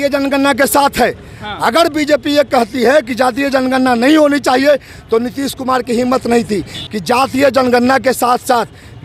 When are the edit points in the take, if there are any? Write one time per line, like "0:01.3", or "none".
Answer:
0:06.7